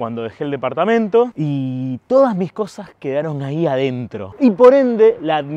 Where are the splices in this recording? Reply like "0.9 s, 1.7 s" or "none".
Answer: 1.3 s, 4.2 s